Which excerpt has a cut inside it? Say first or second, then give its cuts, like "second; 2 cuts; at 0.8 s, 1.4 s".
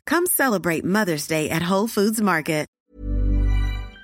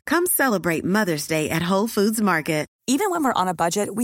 first; 1 cut; at 2.7 s